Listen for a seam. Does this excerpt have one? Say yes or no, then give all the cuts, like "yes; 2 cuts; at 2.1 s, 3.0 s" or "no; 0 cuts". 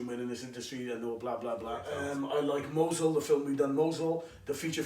yes; 1 cut; at 1.9 s